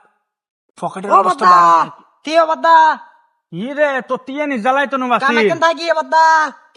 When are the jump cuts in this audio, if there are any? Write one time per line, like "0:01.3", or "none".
none